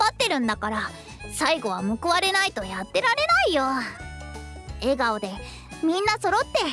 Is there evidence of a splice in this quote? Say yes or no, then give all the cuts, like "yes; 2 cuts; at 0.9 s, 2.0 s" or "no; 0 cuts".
no; 0 cuts